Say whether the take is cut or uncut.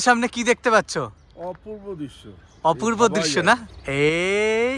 cut